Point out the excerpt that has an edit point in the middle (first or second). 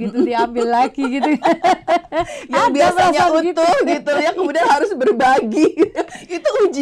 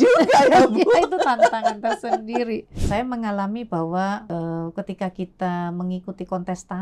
second